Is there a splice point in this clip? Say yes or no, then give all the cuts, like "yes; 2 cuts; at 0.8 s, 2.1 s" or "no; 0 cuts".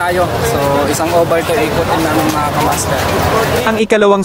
no; 0 cuts